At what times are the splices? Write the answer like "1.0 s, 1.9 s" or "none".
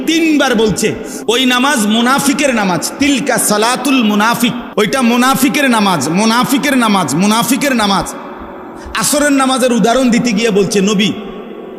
1.4 s, 4.6 s